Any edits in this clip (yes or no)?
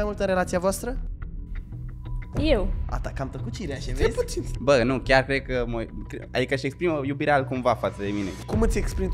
no